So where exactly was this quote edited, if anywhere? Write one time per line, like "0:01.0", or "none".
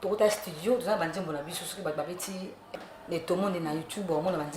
0:02.7